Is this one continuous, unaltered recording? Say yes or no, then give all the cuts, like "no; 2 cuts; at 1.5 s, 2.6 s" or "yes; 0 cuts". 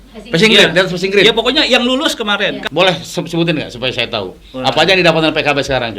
no; 1 cut; at 2.6 s